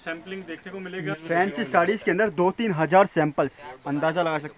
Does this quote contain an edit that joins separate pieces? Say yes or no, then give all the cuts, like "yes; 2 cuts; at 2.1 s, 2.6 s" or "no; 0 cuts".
yes; 1 cut; at 1.1 s